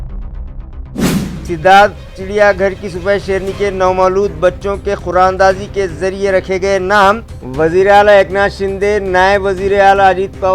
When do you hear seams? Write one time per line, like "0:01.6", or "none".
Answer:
0:01.0